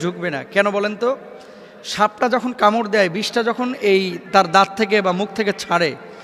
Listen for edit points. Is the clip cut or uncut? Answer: uncut